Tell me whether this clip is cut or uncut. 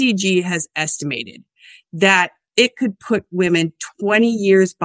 cut